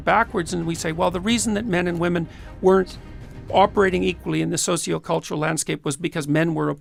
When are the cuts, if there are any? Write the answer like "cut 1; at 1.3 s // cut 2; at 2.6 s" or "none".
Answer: none